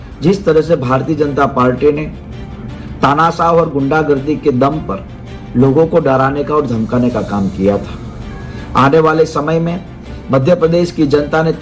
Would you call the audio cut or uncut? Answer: uncut